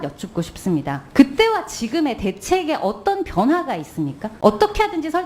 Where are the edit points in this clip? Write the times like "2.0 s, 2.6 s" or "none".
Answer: 1.0 s, 4.2 s